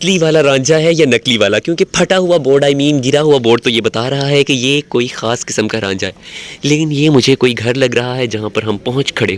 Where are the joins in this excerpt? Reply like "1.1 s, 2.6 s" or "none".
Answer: none